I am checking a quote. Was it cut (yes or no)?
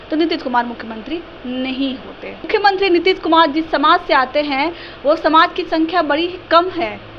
yes